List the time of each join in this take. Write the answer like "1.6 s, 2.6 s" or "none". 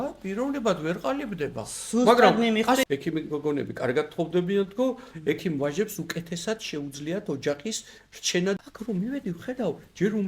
2.8 s, 8.6 s